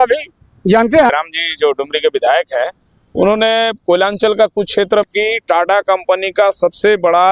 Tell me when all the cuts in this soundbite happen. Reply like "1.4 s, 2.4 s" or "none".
1.1 s, 5.1 s